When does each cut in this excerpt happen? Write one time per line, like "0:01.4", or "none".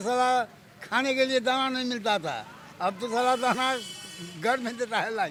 none